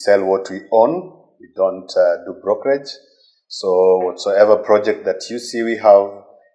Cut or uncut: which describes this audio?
uncut